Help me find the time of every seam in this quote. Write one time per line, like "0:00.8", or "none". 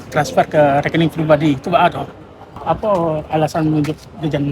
0:02.6